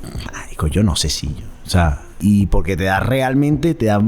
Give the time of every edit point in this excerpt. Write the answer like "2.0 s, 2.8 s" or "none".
2.2 s